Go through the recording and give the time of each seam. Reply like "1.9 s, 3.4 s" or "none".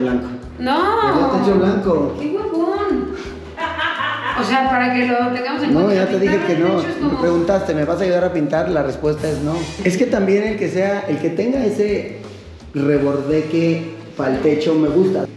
none